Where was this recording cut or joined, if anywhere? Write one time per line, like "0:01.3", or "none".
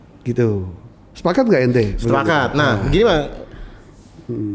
none